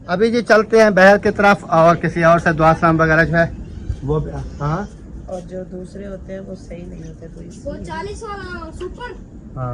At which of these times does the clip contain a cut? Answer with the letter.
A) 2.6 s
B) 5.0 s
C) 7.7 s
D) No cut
B